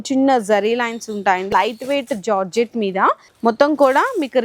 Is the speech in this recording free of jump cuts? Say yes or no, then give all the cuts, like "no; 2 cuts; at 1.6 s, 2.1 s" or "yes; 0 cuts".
no; 2 cuts; at 1.5 s, 3.3 s